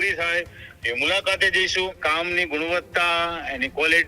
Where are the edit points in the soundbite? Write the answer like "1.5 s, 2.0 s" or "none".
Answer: 2.0 s